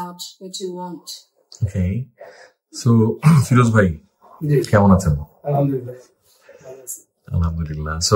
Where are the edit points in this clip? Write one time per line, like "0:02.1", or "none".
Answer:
none